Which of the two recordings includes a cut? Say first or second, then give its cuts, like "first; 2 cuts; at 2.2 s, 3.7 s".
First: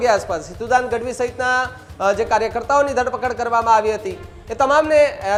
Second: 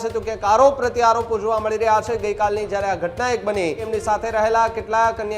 second; 1 cut; at 3.9 s